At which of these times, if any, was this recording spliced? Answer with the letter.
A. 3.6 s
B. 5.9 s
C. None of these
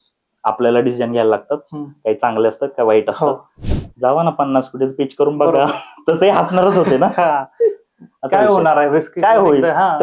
A